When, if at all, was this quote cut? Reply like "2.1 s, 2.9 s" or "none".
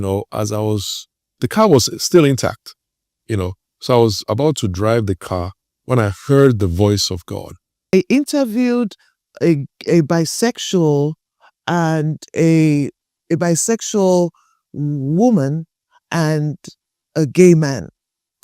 7.9 s